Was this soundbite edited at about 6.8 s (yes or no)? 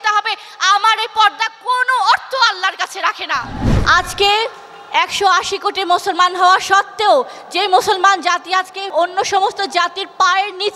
no